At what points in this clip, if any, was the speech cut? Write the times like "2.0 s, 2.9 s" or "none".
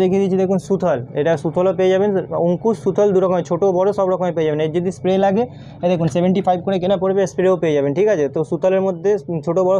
none